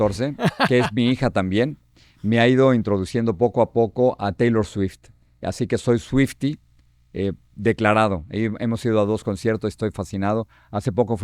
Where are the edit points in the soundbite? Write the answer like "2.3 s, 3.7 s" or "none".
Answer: none